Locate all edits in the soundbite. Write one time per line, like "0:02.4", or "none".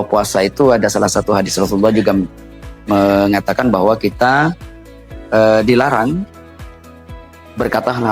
none